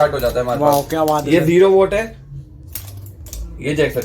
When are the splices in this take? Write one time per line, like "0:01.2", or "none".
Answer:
none